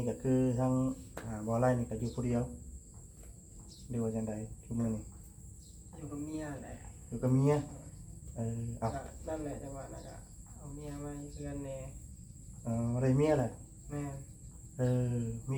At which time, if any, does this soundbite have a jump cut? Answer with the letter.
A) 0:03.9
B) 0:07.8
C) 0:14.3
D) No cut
D